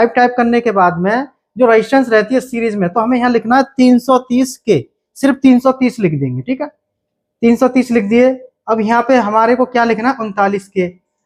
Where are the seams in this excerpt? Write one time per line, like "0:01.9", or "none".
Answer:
none